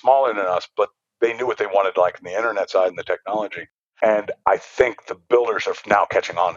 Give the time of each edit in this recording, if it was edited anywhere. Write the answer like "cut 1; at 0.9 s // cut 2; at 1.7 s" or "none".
cut 1; at 4.2 s